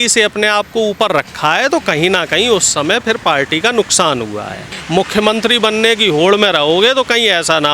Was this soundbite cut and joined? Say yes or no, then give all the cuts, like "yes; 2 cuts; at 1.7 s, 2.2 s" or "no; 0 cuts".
yes; 1 cut; at 4.8 s